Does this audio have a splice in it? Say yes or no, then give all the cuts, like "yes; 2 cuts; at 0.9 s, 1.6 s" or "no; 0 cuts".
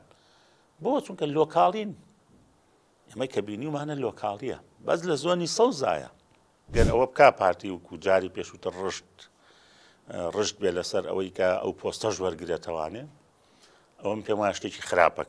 yes; 1 cut; at 6.7 s